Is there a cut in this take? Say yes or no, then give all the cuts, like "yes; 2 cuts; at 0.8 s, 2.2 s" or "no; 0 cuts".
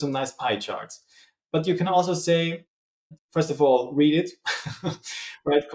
no; 0 cuts